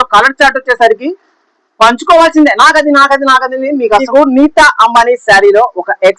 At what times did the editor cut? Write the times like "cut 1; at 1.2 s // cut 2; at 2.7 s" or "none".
cut 1; at 3.9 s